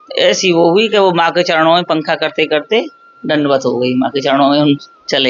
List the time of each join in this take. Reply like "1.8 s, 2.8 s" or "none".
none